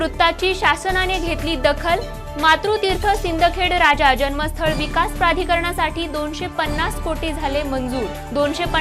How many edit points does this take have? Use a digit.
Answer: 0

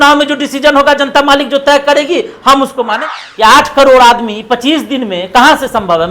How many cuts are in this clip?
1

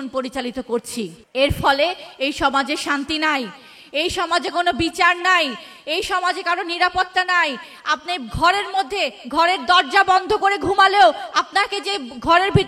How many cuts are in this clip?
1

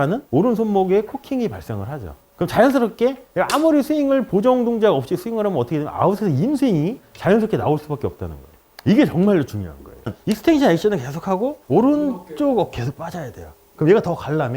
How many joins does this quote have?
1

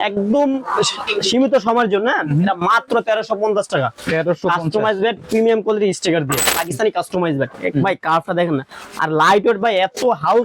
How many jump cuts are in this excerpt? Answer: 1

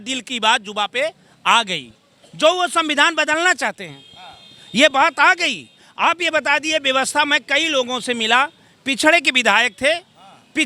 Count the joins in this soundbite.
0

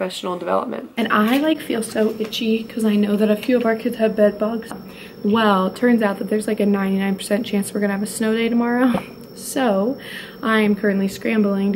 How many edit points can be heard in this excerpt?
2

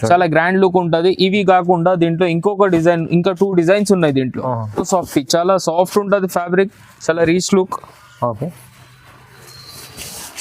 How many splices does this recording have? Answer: 1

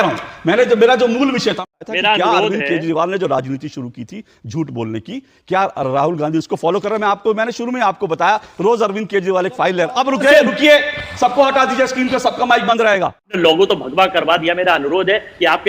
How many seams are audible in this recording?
2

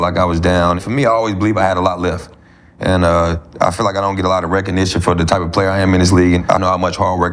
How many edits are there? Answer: 2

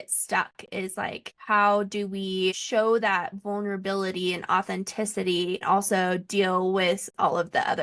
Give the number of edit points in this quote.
3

